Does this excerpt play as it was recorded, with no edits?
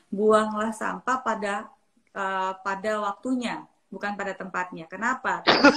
yes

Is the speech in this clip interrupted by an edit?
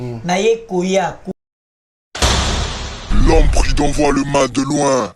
yes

